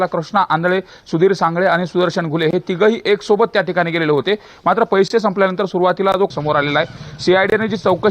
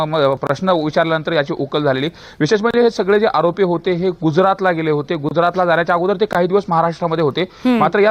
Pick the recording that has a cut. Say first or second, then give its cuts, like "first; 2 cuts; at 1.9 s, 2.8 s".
first; 1 cut; at 6.3 s